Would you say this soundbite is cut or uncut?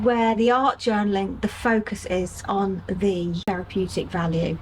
cut